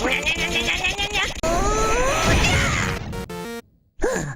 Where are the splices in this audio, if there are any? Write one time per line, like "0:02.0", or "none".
0:01.4
0:03.3